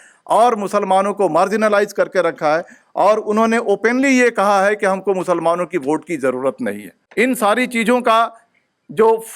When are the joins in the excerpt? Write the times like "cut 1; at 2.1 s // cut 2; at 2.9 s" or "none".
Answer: cut 1; at 7.0 s

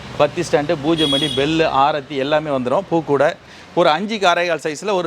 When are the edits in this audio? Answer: cut 1; at 3.5 s

